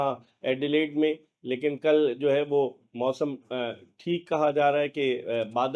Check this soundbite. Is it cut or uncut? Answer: uncut